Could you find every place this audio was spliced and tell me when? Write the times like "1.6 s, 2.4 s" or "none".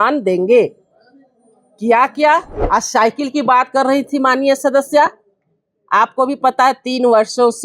2.5 s